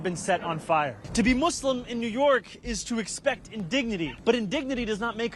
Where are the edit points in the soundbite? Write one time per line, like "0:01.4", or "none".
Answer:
0:01.0
0:04.2